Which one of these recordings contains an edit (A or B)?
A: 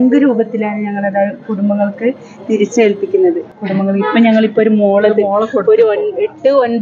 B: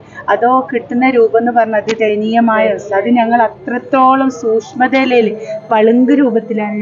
A